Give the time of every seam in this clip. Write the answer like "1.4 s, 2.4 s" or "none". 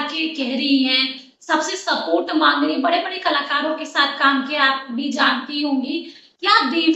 none

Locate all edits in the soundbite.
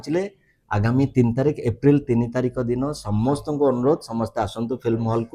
none

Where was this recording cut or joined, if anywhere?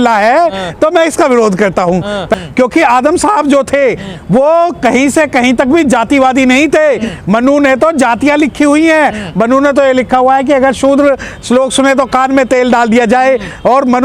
2.3 s

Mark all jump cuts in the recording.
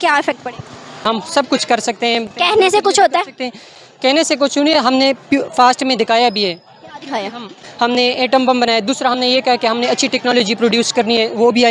0.9 s, 7.7 s

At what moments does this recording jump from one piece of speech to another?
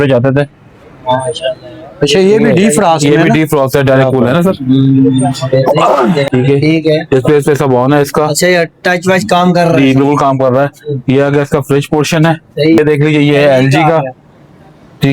6.3 s, 12.8 s

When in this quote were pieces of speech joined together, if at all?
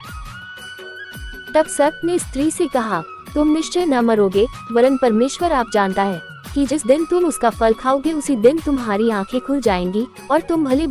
1.5 s

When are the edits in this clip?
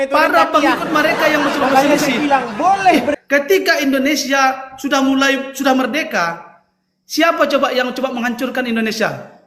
3.2 s

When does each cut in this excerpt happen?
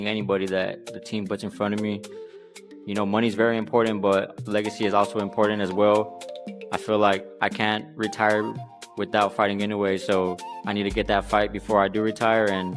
none

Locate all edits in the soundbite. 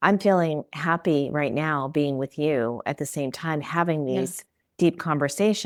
none

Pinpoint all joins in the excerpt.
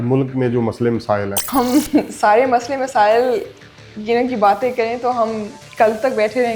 1.4 s

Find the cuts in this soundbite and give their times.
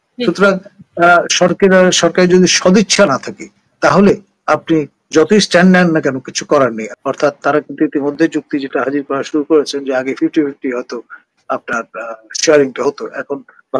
6.9 s

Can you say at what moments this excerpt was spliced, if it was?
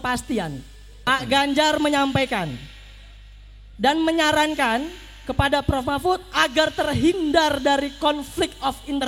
1.1 s

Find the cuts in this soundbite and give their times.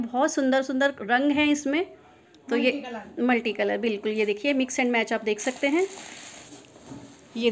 6.4 s

